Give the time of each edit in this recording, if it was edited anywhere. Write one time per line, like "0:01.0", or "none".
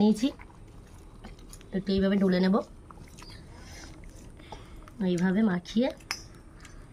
none